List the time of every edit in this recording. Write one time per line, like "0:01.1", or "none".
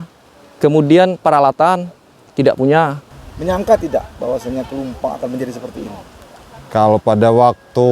0:03.0